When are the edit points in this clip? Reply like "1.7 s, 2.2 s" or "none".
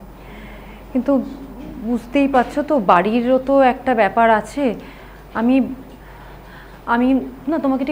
none

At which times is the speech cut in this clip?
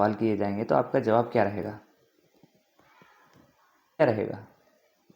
4.0 s

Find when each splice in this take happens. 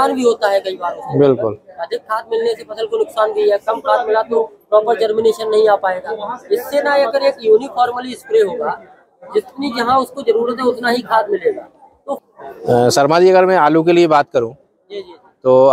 12.2 s

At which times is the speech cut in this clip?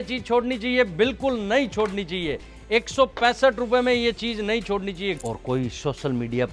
5.2 s

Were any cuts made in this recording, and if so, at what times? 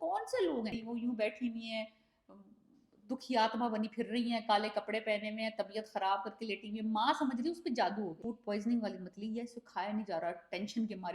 0.8 s, 8.3 s

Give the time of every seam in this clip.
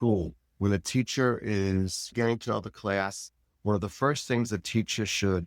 none

